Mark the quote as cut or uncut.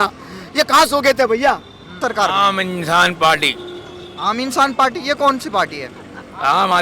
cut